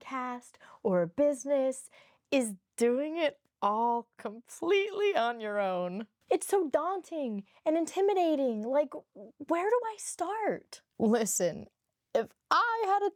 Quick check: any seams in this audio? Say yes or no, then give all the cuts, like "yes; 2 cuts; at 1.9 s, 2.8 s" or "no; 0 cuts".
no; 0 cuts